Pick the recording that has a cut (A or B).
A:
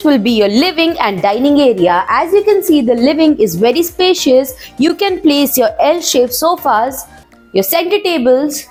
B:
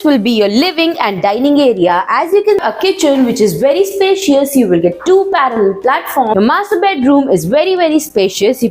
B